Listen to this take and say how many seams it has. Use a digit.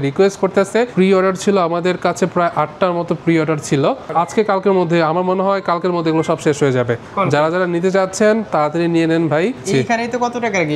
4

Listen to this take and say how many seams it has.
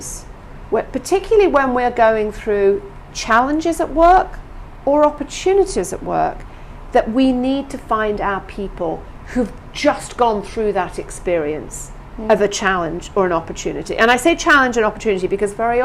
0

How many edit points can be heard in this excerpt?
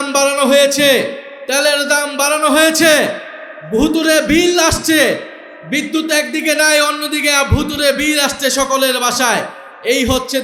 0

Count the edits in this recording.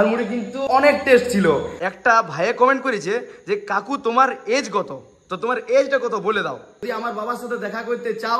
2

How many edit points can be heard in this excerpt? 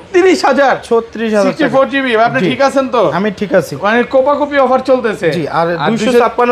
0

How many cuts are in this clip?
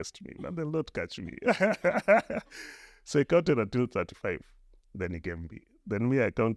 0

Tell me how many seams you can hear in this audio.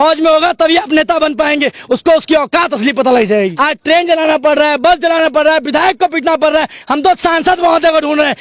1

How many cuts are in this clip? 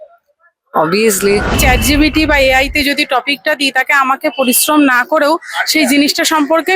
1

